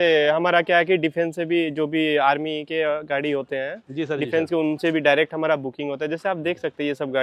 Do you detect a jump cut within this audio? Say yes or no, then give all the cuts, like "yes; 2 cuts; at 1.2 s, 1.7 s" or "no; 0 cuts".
no; 0 cuts